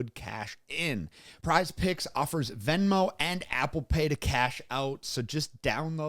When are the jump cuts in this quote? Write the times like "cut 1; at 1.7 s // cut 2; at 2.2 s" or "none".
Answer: cut 1; at 1.2 s